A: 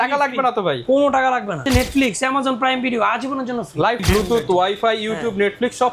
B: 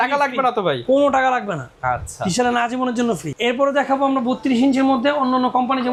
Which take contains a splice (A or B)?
A